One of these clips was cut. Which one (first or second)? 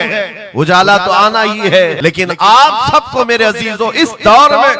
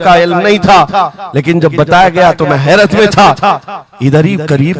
first